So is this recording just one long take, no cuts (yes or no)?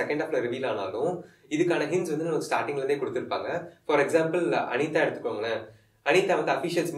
yes